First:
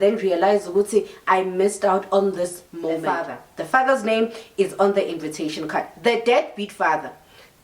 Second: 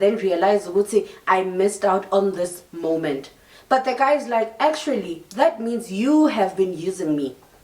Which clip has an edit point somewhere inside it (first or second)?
first